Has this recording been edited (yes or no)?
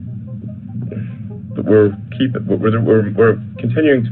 no